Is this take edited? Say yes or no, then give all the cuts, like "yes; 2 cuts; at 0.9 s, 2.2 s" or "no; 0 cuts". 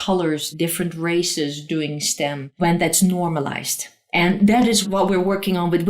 yes; 1 cut; at 2.5 s